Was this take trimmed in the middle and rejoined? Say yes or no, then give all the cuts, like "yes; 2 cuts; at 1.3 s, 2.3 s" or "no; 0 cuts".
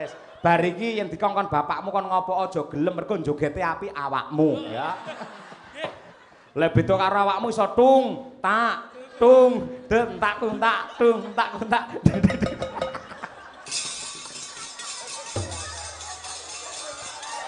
yes; 1 cut; at 6.1 s